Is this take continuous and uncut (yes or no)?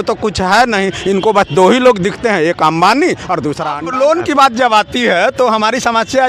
no